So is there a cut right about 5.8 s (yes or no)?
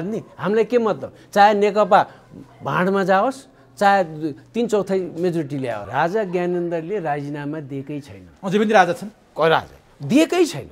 yes